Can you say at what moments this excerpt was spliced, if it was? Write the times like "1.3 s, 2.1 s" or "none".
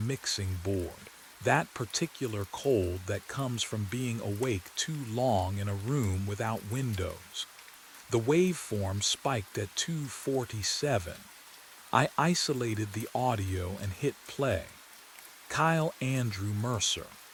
none

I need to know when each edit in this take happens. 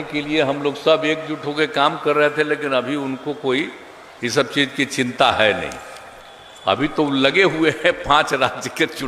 none

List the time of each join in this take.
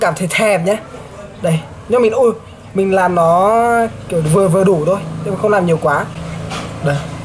6.2 s

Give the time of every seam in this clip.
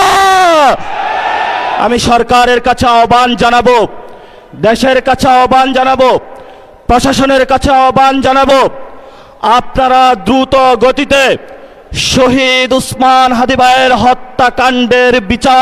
1.8 s

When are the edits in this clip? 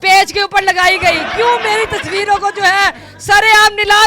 none

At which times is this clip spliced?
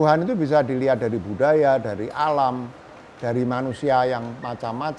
none

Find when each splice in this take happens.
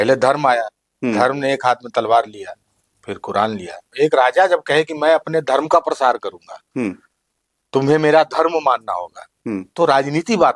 3.9 s

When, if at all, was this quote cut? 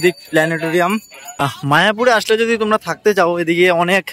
1.2 s

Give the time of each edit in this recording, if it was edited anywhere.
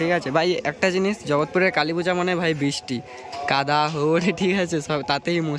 none

